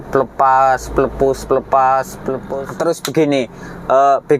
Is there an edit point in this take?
yes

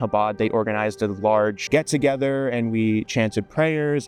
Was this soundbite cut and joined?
no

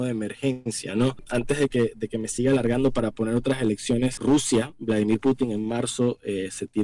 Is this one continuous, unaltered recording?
no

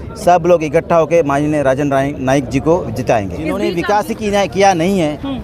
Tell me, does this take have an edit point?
yes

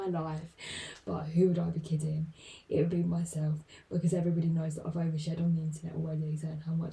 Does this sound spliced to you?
no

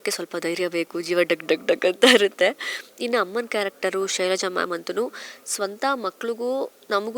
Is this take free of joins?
yes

